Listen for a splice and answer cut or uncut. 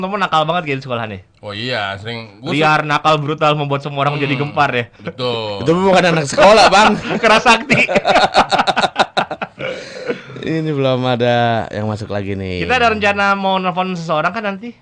uncut